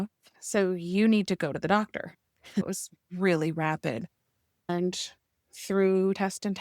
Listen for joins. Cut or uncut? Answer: cut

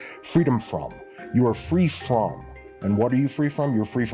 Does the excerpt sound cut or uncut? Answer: uncut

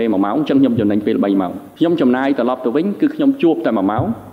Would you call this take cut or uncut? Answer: cut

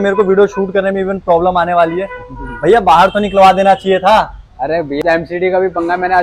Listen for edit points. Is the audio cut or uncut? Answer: cut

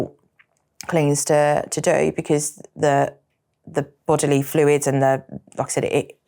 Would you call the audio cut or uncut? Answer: uncut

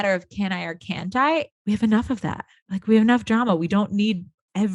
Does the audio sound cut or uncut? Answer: cut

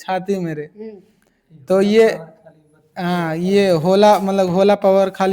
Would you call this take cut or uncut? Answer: uncut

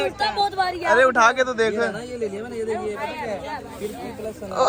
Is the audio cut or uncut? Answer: uncut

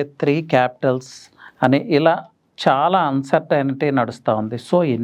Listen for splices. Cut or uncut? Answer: uncut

